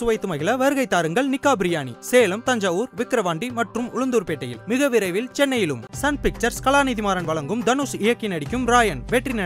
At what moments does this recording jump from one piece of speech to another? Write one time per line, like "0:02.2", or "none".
none